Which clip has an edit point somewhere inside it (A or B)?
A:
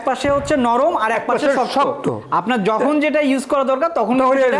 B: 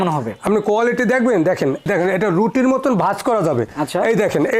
B